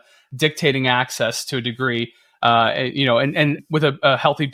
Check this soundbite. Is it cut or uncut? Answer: uncut